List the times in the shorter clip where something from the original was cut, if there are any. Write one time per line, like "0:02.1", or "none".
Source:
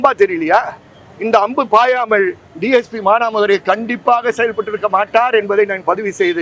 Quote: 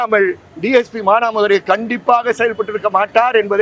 none